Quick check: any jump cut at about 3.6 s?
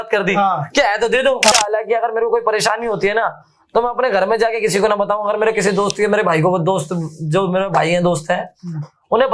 no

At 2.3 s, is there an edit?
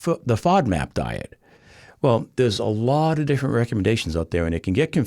no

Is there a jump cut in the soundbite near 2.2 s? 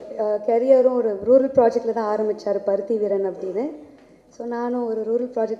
no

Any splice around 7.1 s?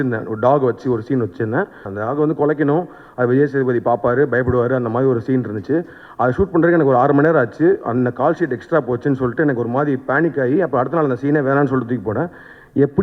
no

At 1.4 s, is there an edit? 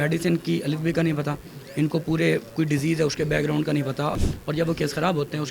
no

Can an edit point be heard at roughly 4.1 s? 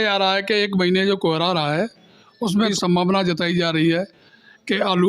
no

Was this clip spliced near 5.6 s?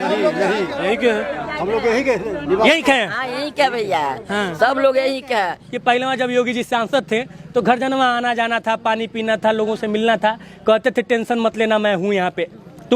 yes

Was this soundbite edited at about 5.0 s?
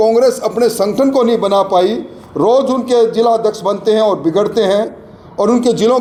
no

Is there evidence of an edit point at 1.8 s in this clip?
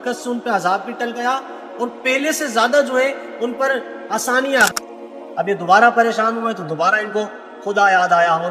no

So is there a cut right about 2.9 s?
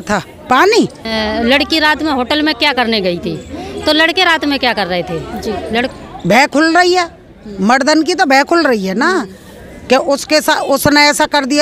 no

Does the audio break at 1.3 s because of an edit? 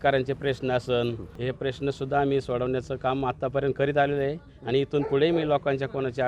yes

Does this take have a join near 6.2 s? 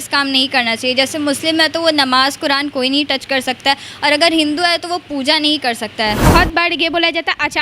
yes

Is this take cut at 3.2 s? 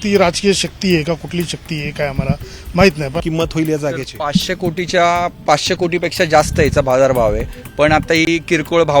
yes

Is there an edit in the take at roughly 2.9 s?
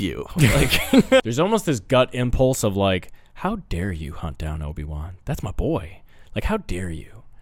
no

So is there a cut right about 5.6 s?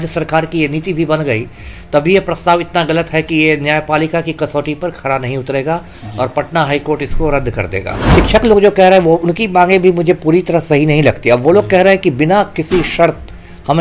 no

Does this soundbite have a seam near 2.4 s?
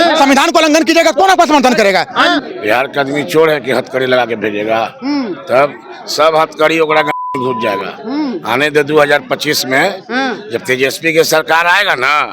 yes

